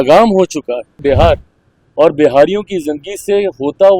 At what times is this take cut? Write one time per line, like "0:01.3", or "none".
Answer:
0:01.0